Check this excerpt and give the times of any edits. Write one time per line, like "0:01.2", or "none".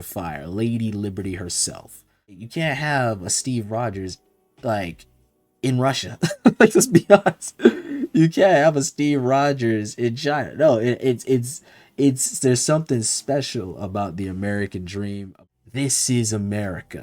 0:02.4
0:15.4

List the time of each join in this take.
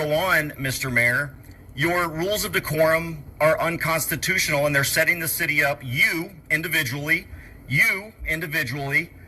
none

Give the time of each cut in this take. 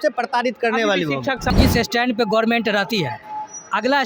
0:01.5

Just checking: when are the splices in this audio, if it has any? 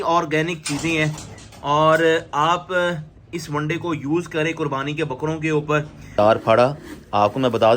0:06.2

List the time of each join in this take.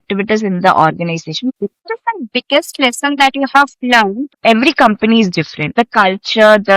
0:01.8
0:04.3
0:05.7

